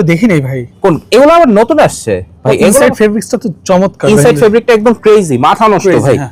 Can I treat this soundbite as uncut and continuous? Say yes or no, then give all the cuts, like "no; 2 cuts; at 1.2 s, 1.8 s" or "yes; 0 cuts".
yes; 0 cuts